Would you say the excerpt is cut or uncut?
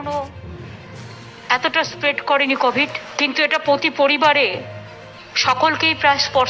cut